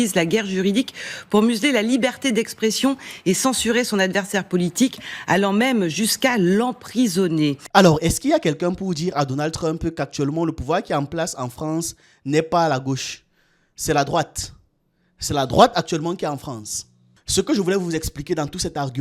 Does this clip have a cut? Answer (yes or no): yes